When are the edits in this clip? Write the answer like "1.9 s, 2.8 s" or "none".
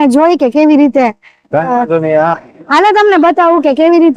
2.3 s

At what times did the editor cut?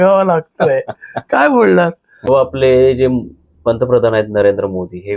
2.3 s

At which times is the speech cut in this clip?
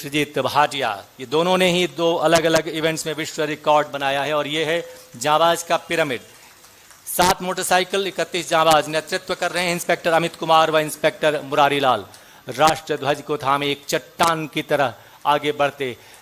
none

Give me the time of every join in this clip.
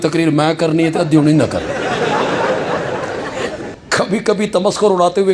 3.7 s

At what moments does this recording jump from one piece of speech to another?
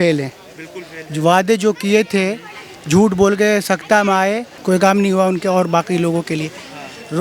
4.5 s

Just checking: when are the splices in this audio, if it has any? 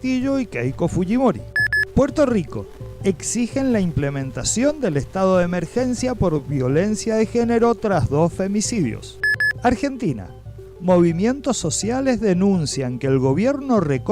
1.5 s, 9.1 s

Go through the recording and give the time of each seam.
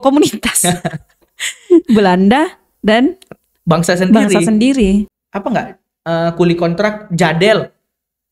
5.1 s

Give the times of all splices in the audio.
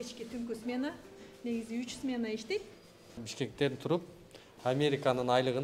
3.2 s

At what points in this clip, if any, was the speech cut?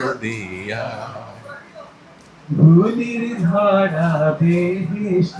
none

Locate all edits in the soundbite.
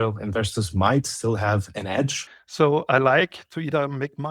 2.2 s

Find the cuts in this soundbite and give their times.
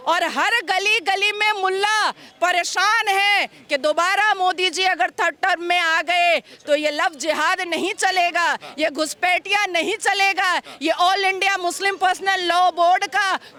none

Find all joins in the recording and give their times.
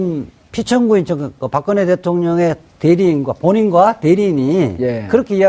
2.7 s

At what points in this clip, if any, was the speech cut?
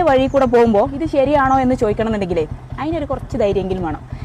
none

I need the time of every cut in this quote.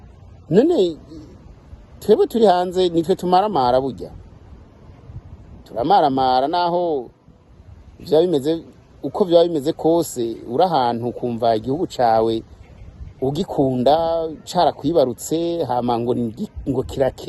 none

